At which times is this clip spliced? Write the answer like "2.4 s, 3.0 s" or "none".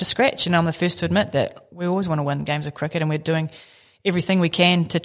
none